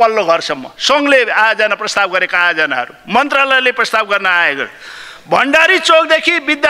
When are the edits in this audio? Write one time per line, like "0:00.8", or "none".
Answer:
none